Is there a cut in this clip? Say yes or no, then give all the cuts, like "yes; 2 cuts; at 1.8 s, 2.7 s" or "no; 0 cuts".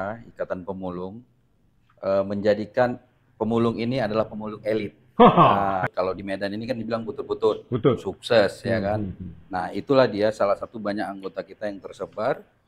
yes; 1 cut; at 5.9 s